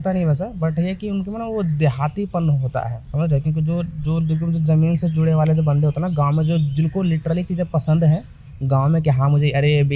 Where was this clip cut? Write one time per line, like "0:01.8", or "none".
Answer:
none